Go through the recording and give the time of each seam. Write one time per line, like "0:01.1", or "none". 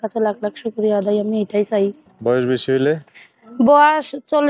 0:02.1